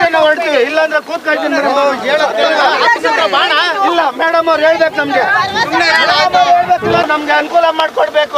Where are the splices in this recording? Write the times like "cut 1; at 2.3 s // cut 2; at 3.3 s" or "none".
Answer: cut 1; at 7.0 s